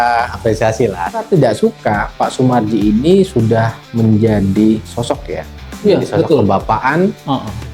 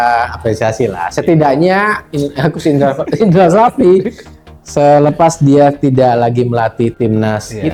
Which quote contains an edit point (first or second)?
first